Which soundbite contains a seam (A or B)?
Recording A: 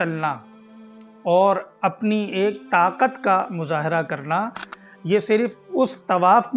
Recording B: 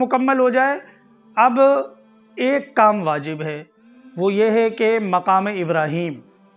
A